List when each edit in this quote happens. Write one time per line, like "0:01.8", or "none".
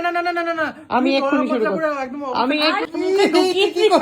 0:02.8